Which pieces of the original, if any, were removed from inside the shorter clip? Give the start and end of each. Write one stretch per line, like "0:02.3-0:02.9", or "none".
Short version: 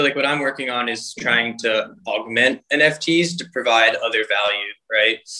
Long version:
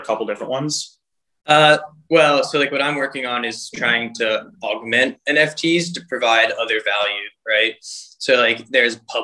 none